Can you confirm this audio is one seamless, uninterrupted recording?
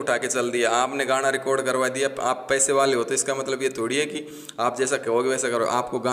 yes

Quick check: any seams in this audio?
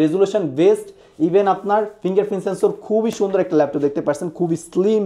no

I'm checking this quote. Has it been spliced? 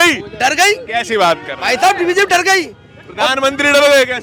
no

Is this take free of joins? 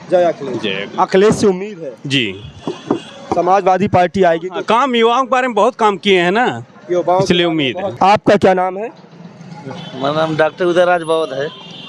yes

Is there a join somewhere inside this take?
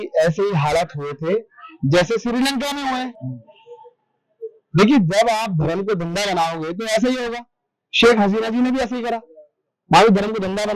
no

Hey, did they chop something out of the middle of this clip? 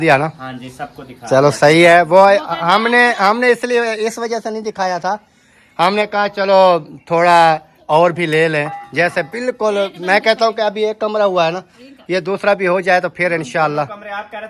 no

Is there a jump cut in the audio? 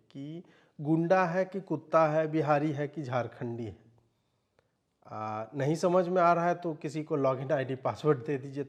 no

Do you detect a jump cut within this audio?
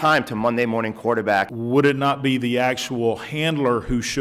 yes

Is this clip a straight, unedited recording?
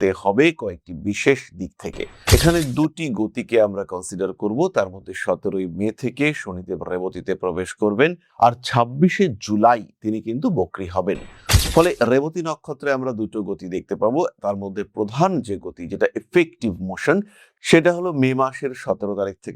no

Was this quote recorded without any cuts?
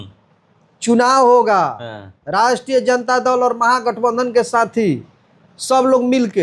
yes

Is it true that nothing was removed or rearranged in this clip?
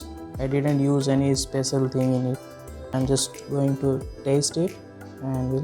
no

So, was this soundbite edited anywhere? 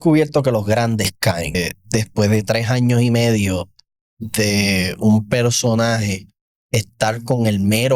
yes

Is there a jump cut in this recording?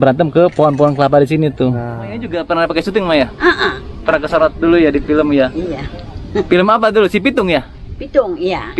yes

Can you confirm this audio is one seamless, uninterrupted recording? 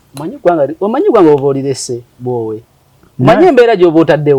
yes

